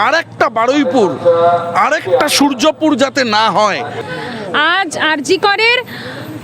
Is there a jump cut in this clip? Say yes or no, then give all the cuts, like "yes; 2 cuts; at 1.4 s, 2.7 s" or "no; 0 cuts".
yes; 1 cut; at 3.9 s